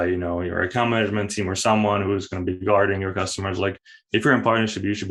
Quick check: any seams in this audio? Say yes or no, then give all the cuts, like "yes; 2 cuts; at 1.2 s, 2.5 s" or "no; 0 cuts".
no; 0 cuts